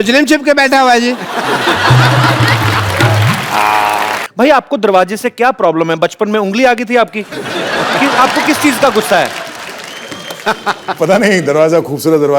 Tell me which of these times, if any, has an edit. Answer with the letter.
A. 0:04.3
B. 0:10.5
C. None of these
A